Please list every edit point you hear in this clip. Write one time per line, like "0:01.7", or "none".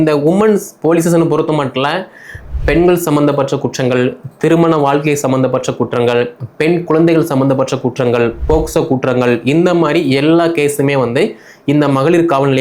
none